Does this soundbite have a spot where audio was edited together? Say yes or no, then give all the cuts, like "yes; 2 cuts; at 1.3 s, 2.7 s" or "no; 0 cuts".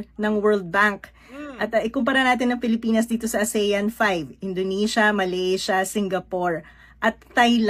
no; 0 cuts